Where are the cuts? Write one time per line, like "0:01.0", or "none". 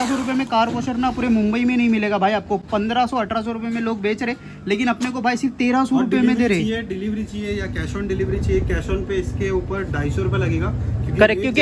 none